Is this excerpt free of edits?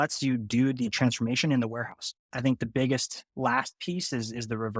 no; 2 cuts; at 0.9 s, 2.3 s

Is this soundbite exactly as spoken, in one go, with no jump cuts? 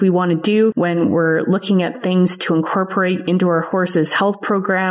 yes; 0 cuts

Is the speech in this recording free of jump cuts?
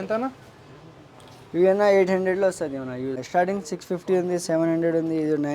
no; 1 cut; at 3.2 s

